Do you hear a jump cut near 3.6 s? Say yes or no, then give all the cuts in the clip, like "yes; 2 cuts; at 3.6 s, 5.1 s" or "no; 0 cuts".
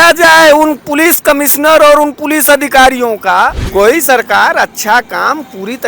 yes; 1 cut; at 3.6 s